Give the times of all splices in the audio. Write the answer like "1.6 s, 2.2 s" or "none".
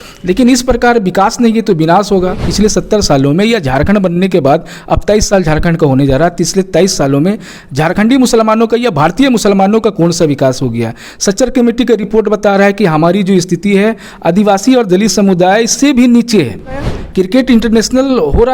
2.5 s, 17.0 s

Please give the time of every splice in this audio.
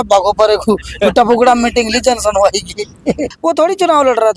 3.3 s

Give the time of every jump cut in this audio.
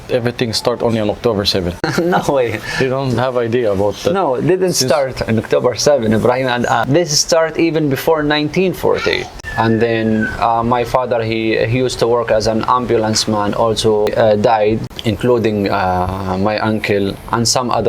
1.8 s, 6.8 s, 9.4 s, 14.1 s, 14.9 s

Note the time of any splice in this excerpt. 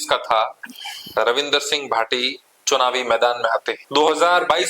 3.7 s

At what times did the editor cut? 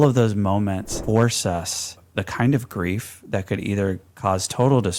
0.9 s, 2.0 s

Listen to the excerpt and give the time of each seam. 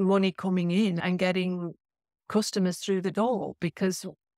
1.0 s

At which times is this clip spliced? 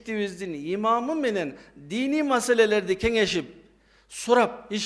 none

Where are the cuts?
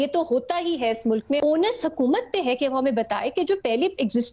1.4 s

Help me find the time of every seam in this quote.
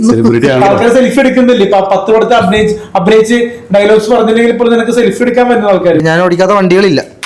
6.0 s

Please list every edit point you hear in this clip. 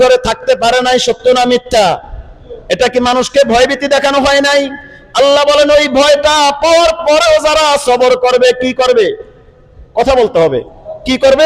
none

